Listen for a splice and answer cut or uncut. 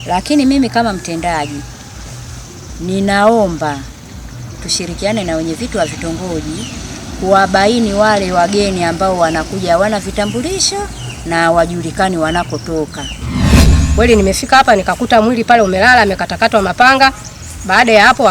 cut